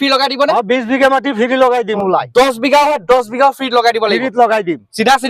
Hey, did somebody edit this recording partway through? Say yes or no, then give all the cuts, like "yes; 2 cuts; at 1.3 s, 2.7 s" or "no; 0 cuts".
yes; 1 cut; at 1.9 s